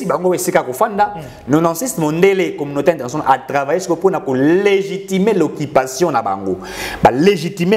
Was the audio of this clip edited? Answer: no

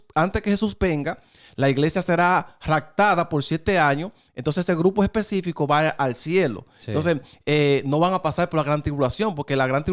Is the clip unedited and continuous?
yes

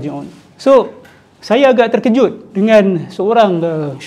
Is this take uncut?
yes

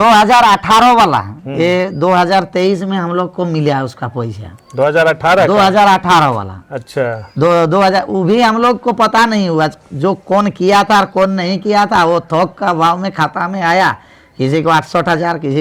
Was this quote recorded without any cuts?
yes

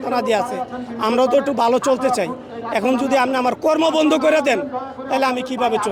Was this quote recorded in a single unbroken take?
yes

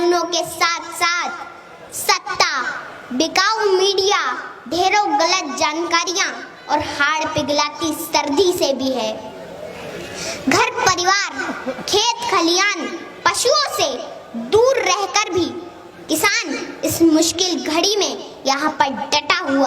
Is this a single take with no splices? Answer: yes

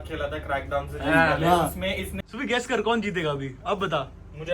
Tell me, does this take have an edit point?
yes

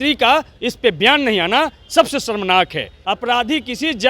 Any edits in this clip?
yes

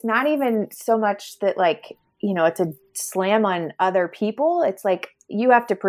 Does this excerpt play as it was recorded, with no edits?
yes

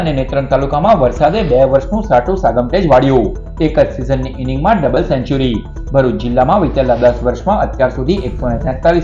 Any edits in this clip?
no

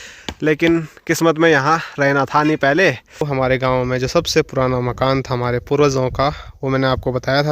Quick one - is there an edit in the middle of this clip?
yes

